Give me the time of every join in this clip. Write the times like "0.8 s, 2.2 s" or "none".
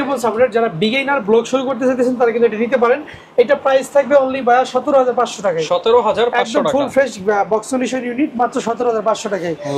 none